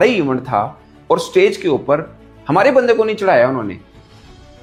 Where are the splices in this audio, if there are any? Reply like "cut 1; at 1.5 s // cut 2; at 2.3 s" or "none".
none

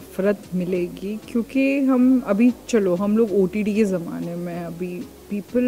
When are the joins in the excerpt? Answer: none

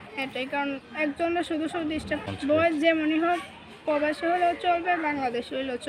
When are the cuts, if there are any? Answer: cut 1; at 2.3 s

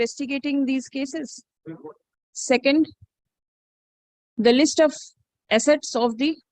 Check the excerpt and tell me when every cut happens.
cut 1; at 2.3 s

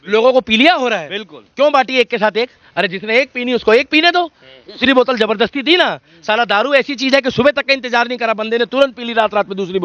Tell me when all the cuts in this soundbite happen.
none

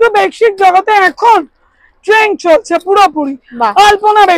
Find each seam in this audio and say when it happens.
none

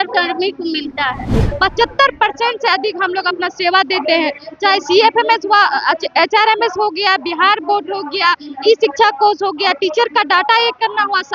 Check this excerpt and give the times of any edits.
cut 1; at 1.5 s

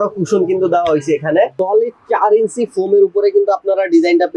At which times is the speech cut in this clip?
cut 1; at 1.6 s

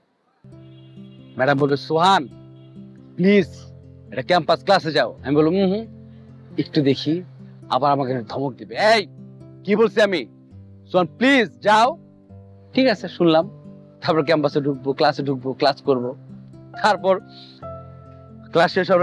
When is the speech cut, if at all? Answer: none

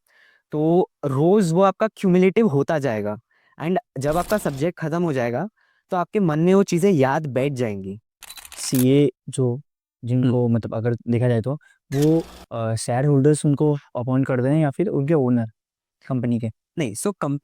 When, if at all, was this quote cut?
cut 1; at 8.5 s

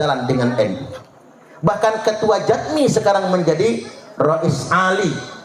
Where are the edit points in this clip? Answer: none

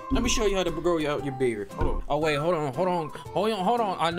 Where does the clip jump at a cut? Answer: cut 1; at 2.0 s

